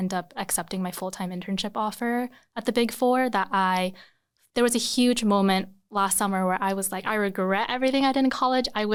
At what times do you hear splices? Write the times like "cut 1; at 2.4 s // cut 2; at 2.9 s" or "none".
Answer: none

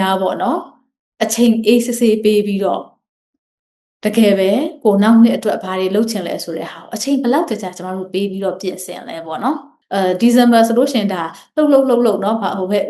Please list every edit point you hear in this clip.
cut 1; at 9.7 s

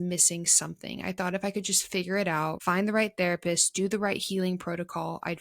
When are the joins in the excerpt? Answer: cut 1; at 2.6 s

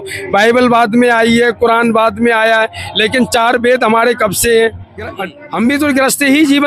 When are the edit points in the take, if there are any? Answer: cut 1; at 5.1 s

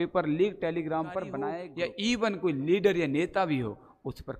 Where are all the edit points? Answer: cut 1; at 1.6 s

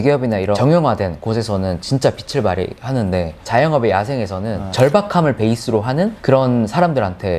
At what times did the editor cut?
none

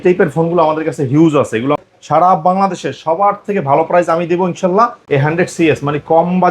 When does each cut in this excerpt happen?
cut 1; at 1.8 s // cut 2; at 5.0 s

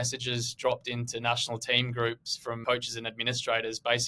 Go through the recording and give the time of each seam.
cut 1; at 2.6 s

